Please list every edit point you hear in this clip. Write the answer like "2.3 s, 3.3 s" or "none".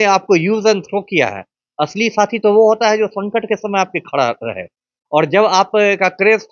none